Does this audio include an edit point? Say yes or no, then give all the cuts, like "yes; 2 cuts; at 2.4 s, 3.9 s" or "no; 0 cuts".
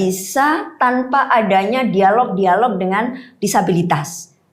no; 0 cuts